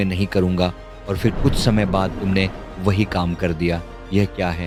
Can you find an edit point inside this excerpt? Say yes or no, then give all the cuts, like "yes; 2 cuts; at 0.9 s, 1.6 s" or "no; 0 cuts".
no; 0 cuts